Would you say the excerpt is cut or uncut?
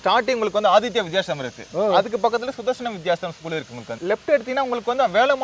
uncut